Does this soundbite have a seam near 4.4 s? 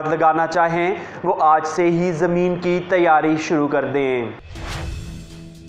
yes; 1 cut; at 4.4 s

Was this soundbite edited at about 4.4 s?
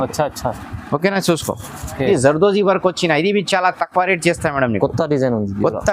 no; 1 cut; at 2.0 s

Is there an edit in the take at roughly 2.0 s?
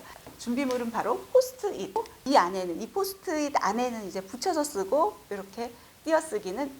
yes; 1 cut; at 2.0 s

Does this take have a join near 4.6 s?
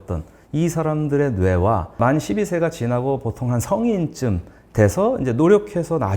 no; 1 cut; at 2.0 s

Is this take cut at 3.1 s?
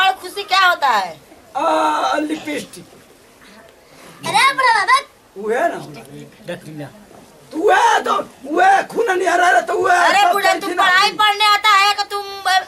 no; 0 cuts

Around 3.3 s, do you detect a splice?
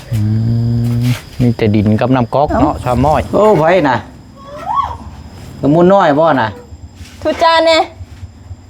yes; 1 cut; at 3.3 s

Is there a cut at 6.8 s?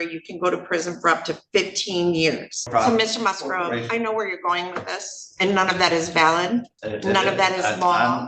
yes; 2 cuts; at 2.7 s, 6.8 s

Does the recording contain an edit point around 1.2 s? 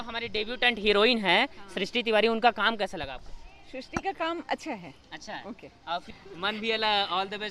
no; 1 cut; at 6.1 s

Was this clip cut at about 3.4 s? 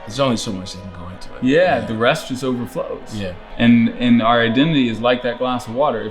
yes; 1 cut; at 3.4 s

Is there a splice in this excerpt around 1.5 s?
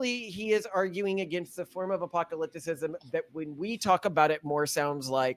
no; 0 cuts

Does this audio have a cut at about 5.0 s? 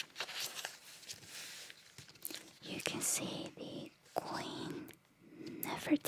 no; 0 cuts

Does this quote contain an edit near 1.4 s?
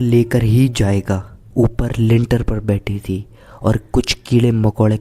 yes; 1 cut; at 1.4 s

